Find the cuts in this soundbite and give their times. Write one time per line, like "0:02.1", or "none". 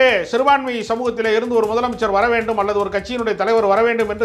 none